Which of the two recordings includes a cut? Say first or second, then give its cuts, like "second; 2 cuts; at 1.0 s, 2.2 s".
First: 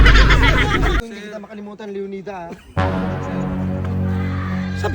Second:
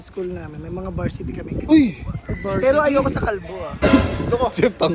first; 1 cut; at 1.0 s